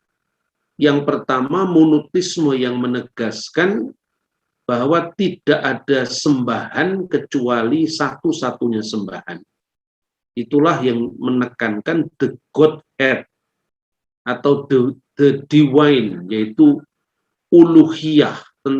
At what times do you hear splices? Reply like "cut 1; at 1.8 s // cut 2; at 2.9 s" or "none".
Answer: none